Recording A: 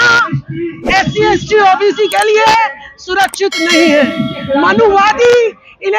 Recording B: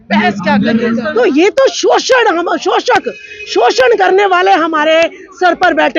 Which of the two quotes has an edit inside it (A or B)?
B